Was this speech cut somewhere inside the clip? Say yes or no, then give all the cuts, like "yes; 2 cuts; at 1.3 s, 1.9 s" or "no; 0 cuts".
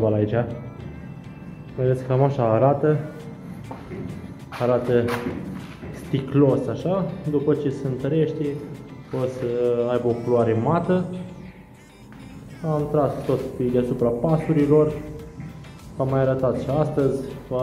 no; 0 cuts